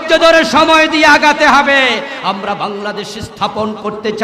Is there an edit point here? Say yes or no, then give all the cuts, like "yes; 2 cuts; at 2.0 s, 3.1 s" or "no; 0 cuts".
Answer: yes; 1 cut; at 2.1 s